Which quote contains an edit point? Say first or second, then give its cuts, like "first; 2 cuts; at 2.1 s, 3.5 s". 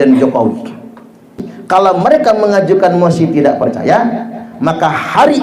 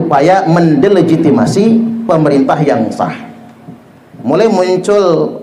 first; 1 cut; at 1.5 s